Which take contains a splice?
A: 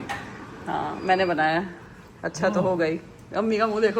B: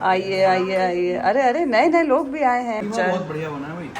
B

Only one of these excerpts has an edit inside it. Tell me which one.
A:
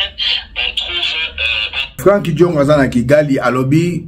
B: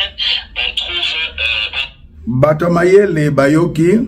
A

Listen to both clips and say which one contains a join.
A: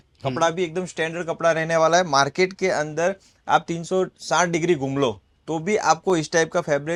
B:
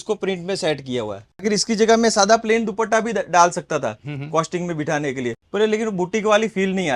B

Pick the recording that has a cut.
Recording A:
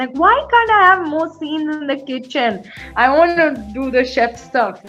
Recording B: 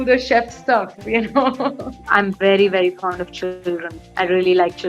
B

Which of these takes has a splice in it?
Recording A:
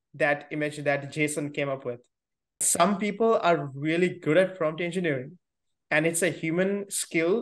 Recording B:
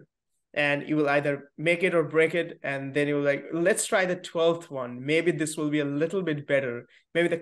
A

